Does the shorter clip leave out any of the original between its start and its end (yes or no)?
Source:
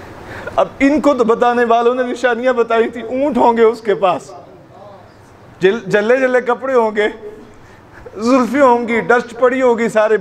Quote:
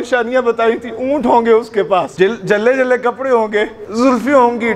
yes